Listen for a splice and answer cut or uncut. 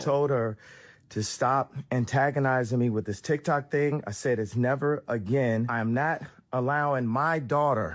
cut